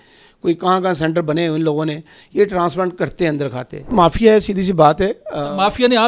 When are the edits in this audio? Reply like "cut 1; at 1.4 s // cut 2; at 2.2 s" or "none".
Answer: cut 1; at 3.9 s